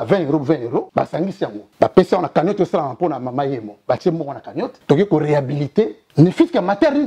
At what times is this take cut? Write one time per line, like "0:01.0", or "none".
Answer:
0:01.0
0:04.8
0:06.0